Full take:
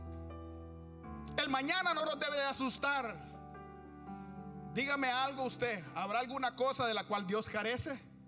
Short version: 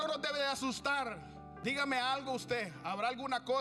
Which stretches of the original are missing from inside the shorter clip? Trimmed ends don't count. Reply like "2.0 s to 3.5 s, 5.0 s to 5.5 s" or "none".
3.5 s to 4.6 s

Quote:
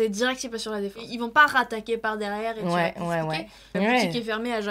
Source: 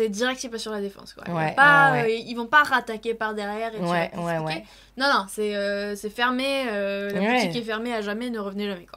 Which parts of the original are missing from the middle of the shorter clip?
1.1 s to 2.3 s, 4.9 s to 7.1 s

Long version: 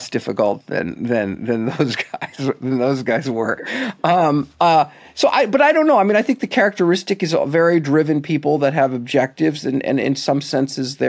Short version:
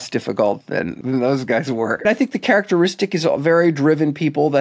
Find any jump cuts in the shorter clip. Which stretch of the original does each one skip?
1.0 s to 2.6 s, 3.6 s to 6.1 s

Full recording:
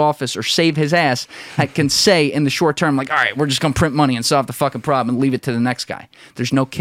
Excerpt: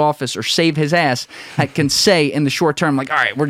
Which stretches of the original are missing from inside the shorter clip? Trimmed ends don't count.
none

